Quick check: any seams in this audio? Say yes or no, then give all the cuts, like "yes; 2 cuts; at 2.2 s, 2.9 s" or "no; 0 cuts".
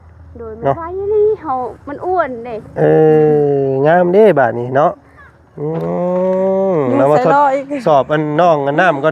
yes; 1 cut; at 5.8 s